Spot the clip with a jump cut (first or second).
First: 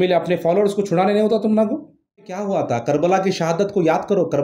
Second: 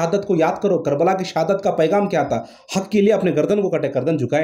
first